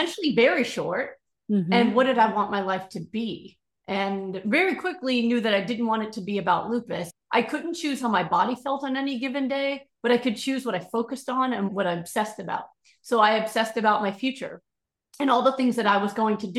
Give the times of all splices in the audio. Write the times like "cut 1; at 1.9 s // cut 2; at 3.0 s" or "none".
cut 1; at 7.1 s // cut 2; at 11.7 s